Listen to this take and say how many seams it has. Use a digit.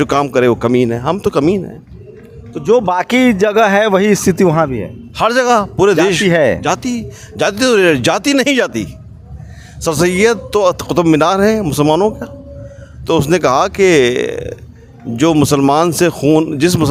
0